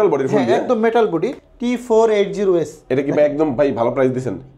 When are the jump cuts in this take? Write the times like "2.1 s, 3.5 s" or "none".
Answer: 1.4 s